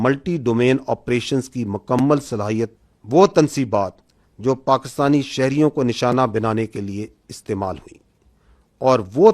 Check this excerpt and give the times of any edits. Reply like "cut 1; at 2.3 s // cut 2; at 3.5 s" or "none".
cut 1; at 2.8 s